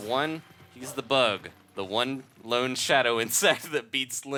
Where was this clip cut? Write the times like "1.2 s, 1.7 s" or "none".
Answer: none